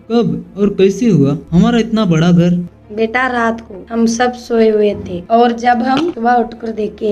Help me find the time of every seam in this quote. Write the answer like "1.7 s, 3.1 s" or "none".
none